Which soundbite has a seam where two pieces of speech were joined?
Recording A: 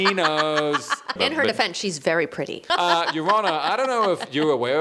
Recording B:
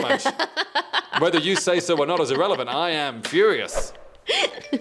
A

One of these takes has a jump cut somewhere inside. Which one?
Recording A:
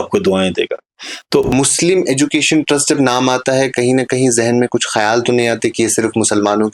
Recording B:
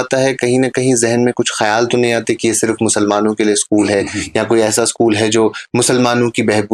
A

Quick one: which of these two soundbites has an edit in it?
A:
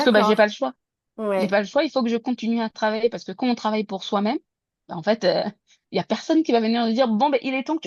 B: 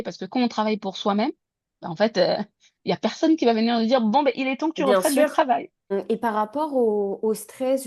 B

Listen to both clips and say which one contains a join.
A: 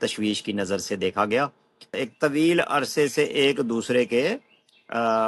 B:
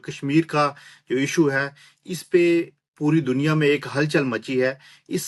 A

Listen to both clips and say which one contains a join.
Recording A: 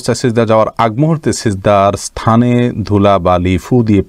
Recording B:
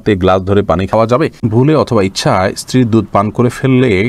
B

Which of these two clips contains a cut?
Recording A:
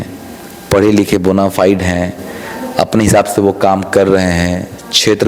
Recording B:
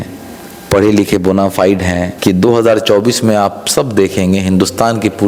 B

